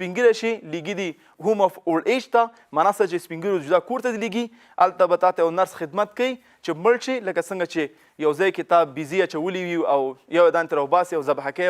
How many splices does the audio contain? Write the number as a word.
one